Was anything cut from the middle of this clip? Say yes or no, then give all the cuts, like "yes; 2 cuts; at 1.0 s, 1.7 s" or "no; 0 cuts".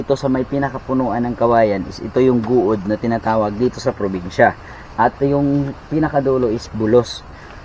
no; 0 cuts